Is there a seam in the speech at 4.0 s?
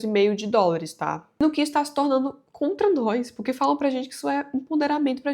no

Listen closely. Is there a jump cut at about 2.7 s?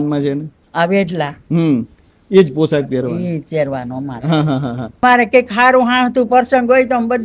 no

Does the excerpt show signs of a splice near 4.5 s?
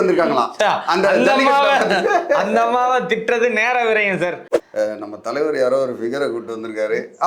yes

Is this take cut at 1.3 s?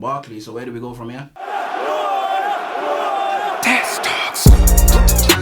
yes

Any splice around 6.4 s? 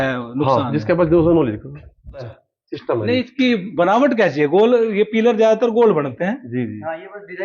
no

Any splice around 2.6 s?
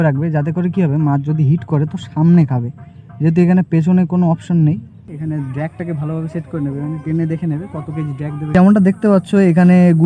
no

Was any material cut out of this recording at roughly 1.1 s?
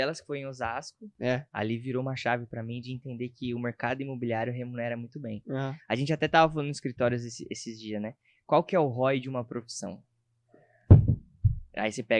yes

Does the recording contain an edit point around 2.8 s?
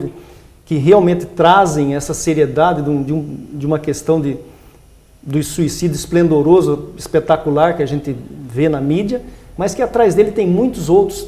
no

